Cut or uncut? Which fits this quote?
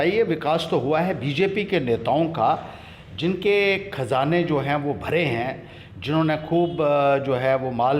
uncut